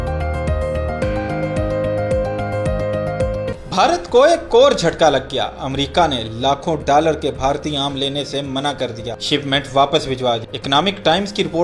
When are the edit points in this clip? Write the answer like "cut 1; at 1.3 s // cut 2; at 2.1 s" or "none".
cut 1; at 3.5 s